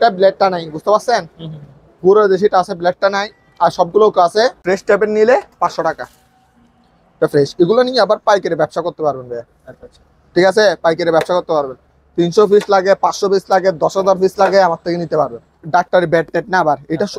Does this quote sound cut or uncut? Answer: cut